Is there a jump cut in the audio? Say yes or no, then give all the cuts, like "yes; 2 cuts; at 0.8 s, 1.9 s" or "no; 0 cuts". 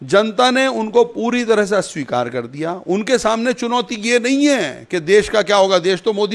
no; 0 cuts